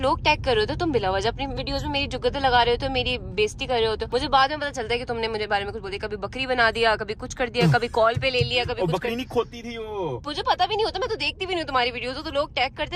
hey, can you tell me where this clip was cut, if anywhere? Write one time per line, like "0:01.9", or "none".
none